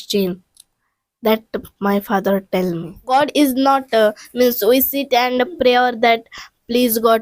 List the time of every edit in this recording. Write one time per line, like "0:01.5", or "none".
0:03.0